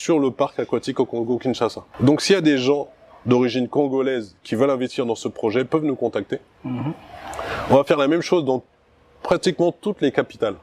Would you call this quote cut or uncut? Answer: uncut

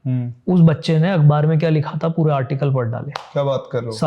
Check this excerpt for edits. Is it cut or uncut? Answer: uncut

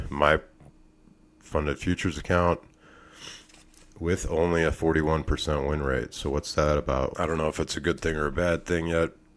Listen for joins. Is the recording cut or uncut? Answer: cut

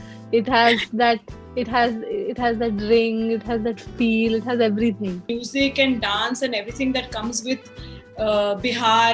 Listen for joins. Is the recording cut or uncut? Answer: cut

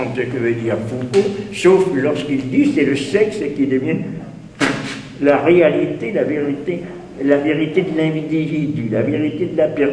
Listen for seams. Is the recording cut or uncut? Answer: uncut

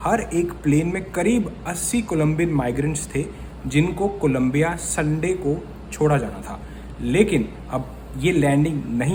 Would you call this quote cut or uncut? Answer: uncut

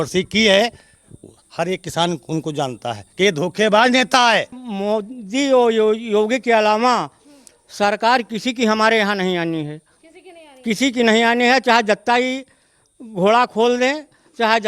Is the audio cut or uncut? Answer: cut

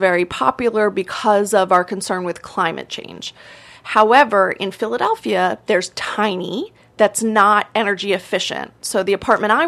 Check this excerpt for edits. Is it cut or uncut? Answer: uncut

